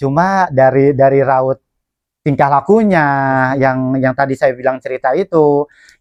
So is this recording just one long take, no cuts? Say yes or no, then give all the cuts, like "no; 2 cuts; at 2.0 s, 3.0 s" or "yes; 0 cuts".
yes; 0 cuts